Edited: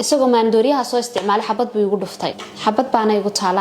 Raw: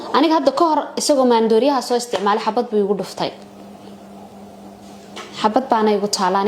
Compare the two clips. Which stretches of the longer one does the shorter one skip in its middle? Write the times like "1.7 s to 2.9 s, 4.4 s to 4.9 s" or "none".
3.4 s to 5.2 s

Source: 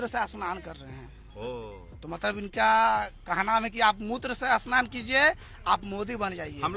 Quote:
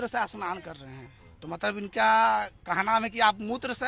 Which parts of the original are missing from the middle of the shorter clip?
1.2 s to 1.8 s

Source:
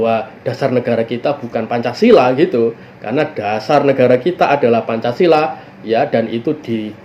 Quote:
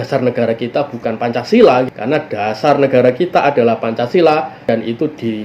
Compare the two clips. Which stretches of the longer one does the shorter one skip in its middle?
2.4 s to 2.9 s, 5.7 s to 6.1 s

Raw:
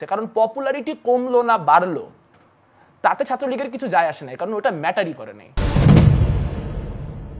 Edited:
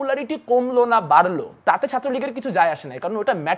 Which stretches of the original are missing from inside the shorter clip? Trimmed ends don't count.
2.1 s to 2.9 s

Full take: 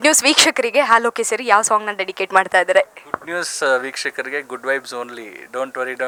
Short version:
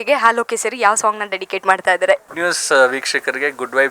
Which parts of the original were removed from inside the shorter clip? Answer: 3.0 s to 3.2 s

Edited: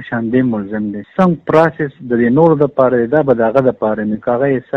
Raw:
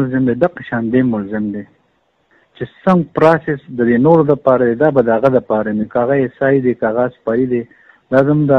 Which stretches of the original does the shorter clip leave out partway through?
1.6 s to 2.7 s

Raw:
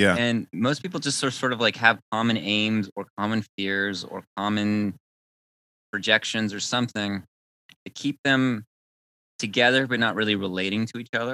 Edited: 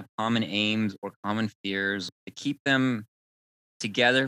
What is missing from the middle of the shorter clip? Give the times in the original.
4.1 s to 7.8 s

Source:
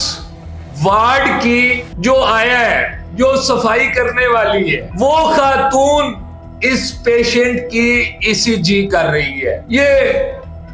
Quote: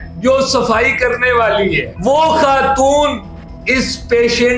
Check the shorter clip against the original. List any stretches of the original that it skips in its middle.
none

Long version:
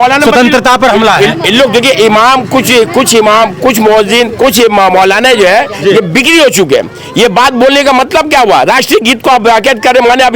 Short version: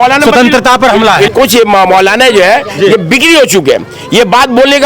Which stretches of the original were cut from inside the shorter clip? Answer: 1.3 s to 4.3 s

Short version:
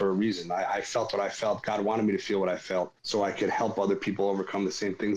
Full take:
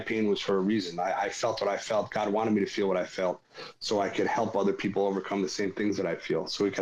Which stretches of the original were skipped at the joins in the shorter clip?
3.5 s to 3.7 s

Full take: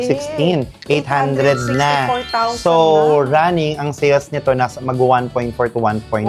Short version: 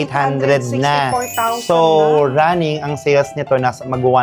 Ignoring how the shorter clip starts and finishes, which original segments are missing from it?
none

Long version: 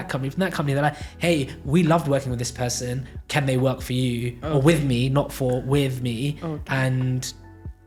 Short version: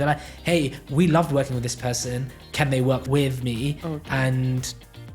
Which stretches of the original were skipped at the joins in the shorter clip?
3.8 s to 5.6 s

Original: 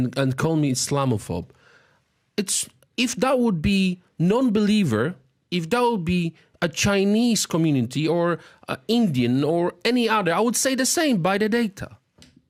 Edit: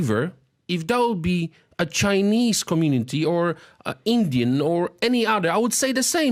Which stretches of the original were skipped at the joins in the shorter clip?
none

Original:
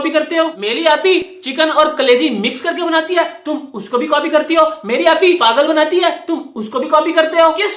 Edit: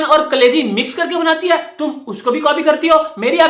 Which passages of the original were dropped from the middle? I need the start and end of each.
none

